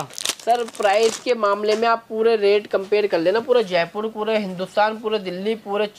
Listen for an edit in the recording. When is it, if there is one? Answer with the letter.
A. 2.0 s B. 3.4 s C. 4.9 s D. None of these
D